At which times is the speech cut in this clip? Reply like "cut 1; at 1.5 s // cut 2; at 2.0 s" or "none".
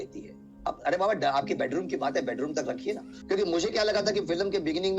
cut 1; at 3.1 s